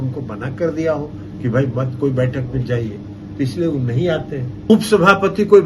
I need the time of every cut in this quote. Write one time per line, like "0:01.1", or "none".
0:04.7